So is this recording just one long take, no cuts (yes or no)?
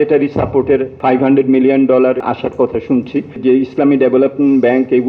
no